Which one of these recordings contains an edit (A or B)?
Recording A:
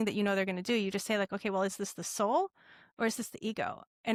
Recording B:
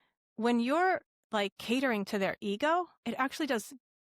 B